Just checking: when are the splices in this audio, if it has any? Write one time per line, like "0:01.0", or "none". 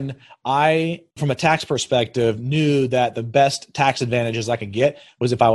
0:01.1